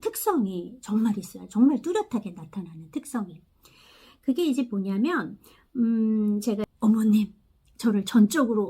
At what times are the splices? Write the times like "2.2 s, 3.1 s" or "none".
6.7 s